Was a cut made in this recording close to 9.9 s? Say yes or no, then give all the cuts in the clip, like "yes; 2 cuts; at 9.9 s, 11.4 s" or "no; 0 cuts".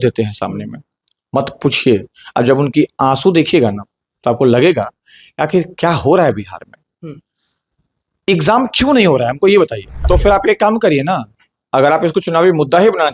yes; 1 cut; at 9.9 s